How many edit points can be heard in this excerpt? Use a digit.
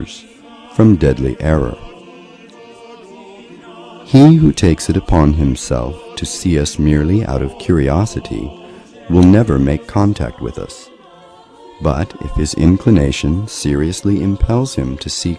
1